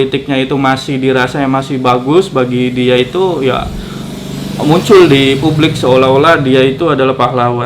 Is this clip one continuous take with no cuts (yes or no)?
yes